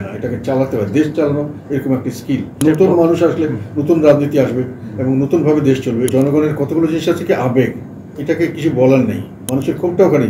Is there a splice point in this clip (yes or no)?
yes